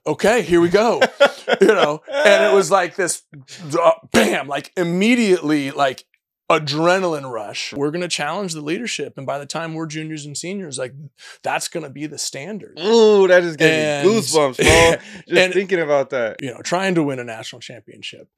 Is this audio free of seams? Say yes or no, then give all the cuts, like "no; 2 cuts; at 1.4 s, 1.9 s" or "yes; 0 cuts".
no; 2 cuts; at 7.7 s, 16.3 s